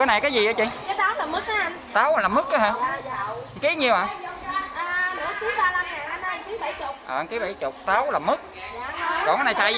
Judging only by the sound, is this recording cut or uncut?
uncut